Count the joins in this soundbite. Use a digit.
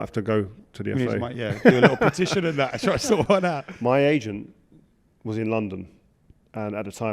1